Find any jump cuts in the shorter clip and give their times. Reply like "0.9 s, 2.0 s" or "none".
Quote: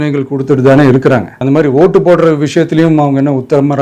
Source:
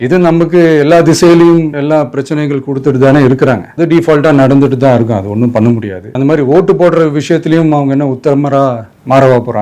1.3 s